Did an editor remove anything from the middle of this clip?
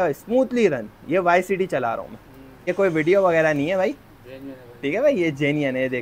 yes; 1 cut; at 2.7 s

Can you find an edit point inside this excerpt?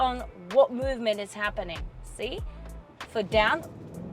no; 0 cuts

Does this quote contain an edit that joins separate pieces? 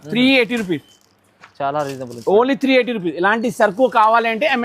no; 0 cuts

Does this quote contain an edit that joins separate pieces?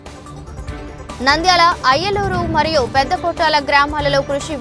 yes; 1 cut; at 1.2 s

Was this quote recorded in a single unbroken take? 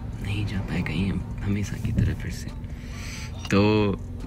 yes; 0 cuts

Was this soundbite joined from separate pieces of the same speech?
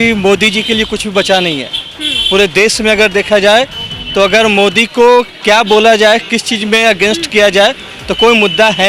no; 0 cuts

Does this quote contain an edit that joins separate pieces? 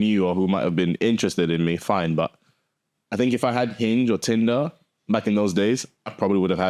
no; 0 cuts

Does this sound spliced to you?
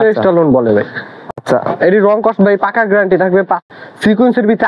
yes; 1 cut; at 3.6 s

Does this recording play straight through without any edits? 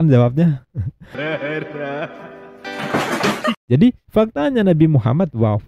no; 1 cut; at 3.6 s

